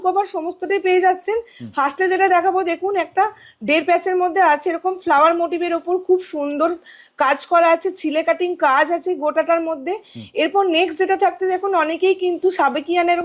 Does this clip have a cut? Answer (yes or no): no